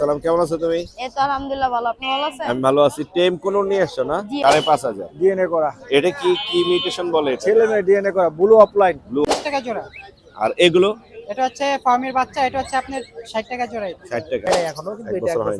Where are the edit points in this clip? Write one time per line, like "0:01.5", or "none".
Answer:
0:04.3
0:09.2
0:14.5